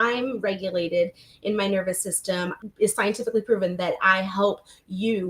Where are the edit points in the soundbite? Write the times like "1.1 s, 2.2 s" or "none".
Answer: 2.6 s